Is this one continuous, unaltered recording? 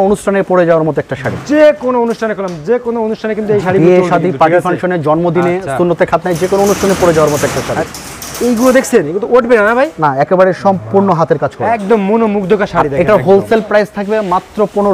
yes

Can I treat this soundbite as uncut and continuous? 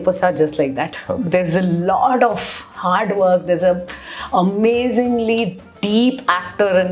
yes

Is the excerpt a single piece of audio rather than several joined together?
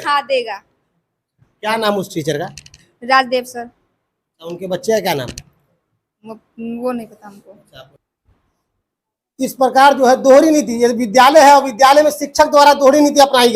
no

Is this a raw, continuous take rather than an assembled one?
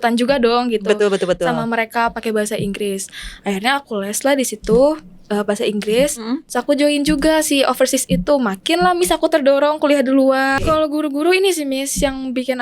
no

